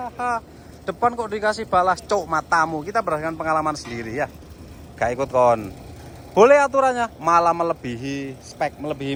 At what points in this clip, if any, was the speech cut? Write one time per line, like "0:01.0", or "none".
none